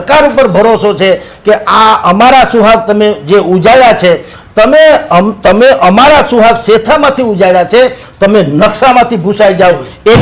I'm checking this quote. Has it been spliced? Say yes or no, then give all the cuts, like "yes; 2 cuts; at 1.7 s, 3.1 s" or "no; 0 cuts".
no; 0 cuts